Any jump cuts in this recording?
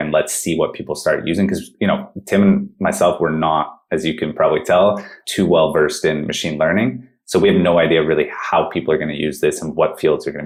no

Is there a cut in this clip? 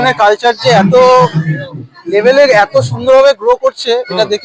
no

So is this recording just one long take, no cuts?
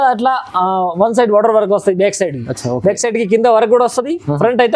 yes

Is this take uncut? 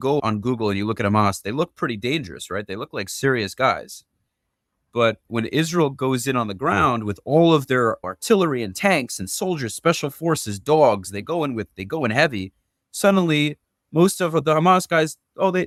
yes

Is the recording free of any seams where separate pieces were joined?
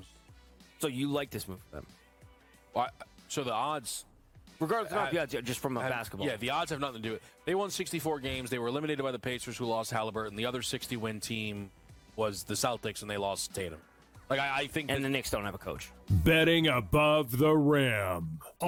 yes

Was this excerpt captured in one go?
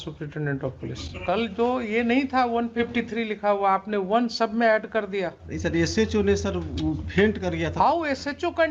no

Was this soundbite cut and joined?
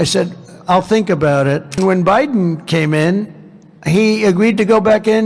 yes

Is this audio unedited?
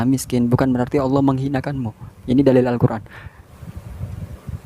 no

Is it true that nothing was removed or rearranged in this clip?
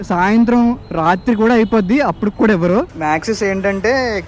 no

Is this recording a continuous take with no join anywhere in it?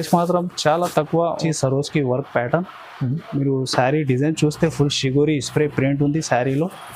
no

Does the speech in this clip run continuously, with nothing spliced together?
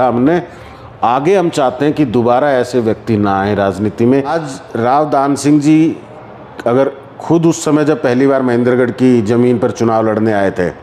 no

